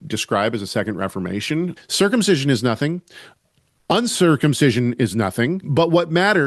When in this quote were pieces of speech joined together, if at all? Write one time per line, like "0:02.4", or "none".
0:01.8
0:05.6